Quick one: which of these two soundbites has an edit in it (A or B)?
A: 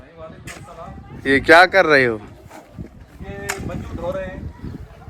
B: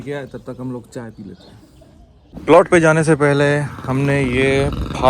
B